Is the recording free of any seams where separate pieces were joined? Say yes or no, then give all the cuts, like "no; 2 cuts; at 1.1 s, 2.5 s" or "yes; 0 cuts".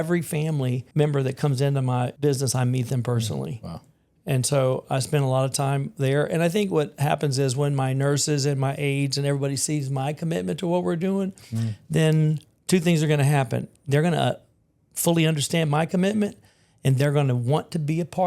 no; 2 cuts; at 0.8 s, 2.1 s